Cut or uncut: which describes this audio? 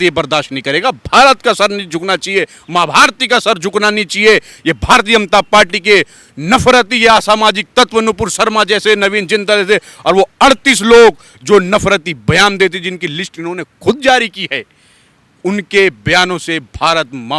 uncut